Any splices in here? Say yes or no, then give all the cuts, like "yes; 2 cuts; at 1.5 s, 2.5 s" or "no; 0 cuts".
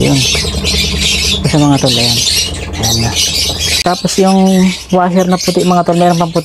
yes; 1 cut; at 3.6 s